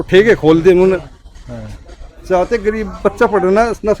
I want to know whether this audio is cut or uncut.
uncut